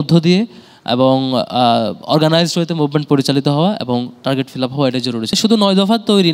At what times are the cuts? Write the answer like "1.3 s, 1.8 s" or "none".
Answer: 5.3 s